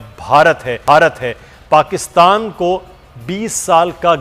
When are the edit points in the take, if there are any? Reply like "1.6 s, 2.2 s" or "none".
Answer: none